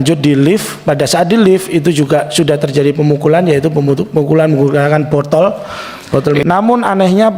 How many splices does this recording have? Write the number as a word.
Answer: one